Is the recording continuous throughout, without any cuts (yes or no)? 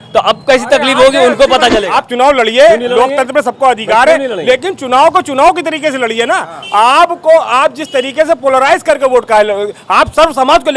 no